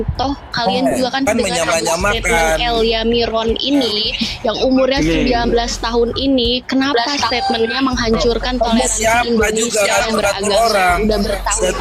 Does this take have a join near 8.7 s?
no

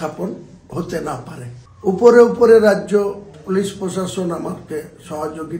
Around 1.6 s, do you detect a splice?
yes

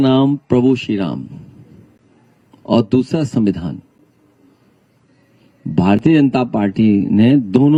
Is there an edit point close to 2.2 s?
no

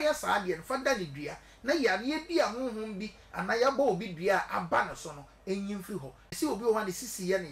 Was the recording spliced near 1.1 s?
no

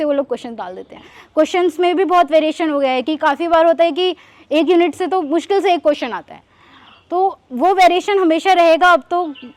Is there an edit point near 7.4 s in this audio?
no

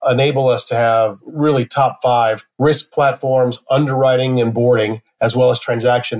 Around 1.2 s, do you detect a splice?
yes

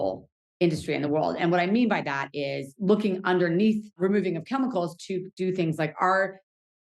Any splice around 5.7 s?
no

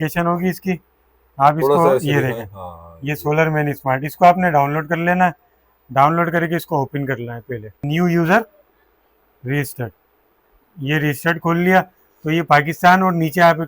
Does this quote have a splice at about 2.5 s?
no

